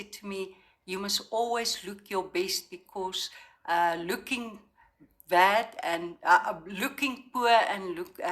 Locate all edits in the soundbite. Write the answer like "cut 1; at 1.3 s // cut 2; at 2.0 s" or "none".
none